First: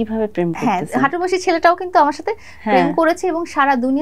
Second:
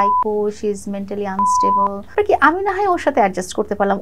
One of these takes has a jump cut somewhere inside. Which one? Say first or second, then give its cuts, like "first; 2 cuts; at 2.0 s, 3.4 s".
second; 1 cut; at 2.1 s